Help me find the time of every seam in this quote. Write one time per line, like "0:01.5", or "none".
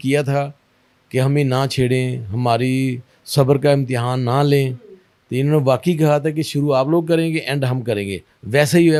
none